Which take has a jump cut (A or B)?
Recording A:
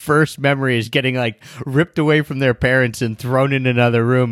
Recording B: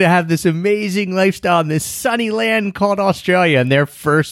A